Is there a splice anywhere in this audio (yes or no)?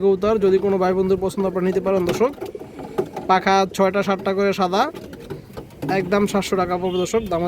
no